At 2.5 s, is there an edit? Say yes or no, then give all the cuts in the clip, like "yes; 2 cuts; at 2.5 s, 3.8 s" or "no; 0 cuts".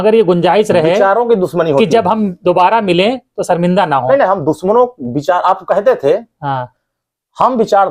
no; 0 cuts